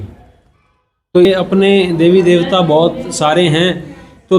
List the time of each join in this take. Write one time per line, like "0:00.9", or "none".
0:01.3

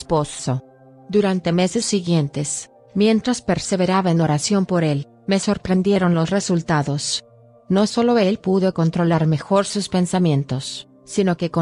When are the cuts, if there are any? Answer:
none

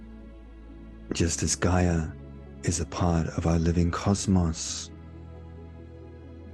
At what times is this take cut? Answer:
0:00.8
0:04.6

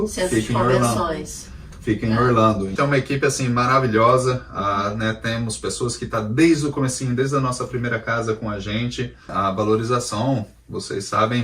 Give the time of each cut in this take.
0:02.7
0:09.3

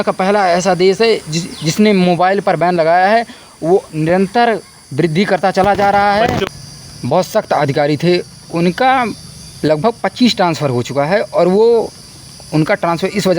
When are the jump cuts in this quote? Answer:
0:06.5

